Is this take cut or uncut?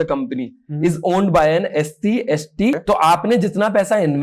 cut